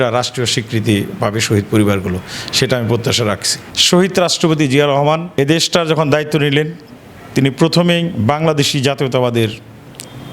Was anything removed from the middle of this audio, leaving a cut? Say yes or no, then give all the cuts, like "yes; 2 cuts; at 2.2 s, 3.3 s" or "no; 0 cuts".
no; 0 cuts